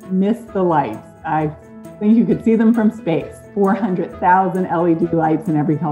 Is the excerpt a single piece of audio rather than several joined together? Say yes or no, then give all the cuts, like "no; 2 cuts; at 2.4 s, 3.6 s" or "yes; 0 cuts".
no; 1 cut; at 3.4 s